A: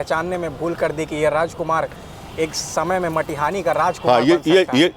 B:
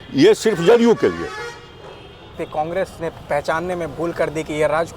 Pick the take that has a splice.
B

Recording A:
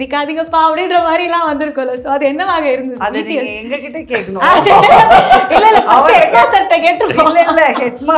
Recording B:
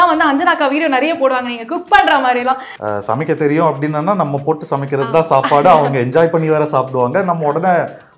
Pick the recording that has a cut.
B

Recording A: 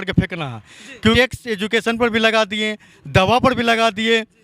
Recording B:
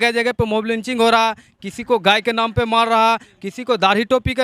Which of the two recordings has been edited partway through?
A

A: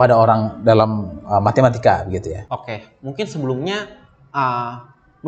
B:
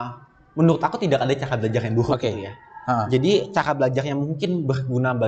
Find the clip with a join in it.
A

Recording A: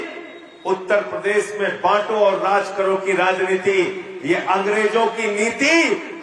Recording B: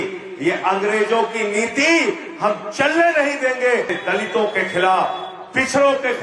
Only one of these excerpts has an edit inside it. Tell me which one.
B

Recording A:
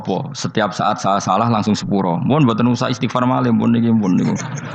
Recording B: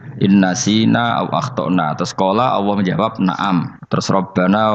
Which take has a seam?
B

